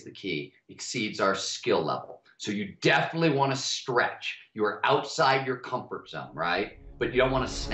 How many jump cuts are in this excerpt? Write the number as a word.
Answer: one